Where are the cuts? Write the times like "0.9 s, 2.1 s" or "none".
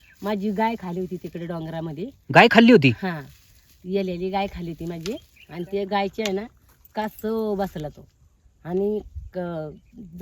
5.4 s